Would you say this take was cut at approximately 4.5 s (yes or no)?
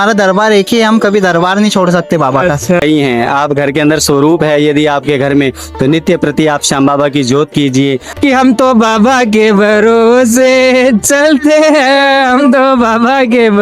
no